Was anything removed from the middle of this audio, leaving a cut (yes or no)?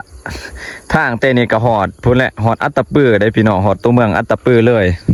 no